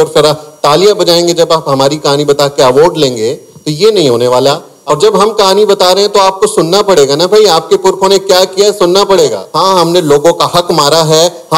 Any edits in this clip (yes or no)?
yes